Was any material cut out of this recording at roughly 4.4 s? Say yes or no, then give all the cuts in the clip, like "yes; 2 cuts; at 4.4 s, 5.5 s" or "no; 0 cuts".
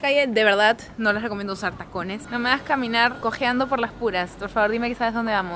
no; 2 cuts; at 2.2 s, 3.2 s